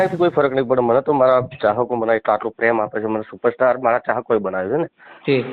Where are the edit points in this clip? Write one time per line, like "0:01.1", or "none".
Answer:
none